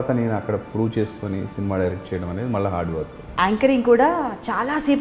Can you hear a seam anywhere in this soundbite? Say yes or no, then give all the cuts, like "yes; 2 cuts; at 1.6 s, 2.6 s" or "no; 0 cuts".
yes; 1 cut; at 3.2 s